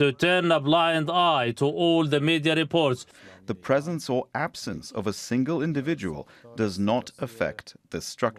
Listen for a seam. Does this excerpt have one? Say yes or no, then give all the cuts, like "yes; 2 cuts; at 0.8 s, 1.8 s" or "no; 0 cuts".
yes; 1 cut; at 3.1 s